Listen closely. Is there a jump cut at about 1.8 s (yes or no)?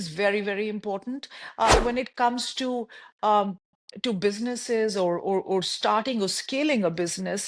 yes